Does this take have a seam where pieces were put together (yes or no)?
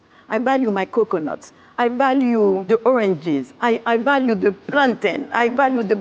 yes